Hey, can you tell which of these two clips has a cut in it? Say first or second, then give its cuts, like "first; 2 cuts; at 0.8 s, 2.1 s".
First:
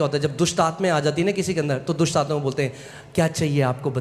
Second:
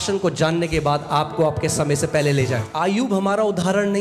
second; 1 cut; at 2.7 s